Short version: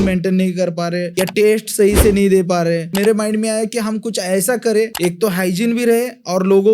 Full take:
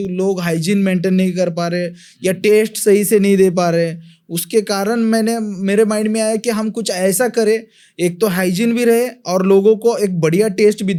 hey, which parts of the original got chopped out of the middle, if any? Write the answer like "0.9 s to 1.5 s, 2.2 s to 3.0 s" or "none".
1.9 s to 2.2 s, 4.0 s to 5.6 s, 7.7 s to 7.9 s